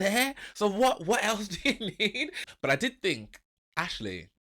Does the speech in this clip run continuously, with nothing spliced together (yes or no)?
no